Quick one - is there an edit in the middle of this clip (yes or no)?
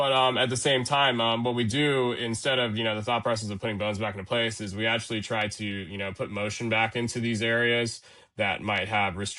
no